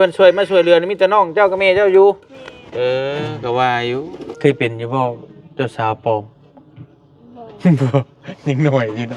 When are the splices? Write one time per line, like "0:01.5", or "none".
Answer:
0:04.2